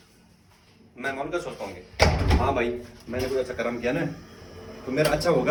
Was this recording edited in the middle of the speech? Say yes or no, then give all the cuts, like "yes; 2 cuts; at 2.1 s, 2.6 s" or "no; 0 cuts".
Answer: no; 0 cuts